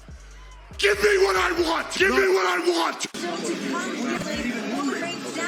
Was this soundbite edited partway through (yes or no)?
no